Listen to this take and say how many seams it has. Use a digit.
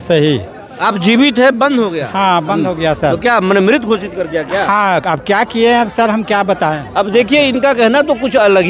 0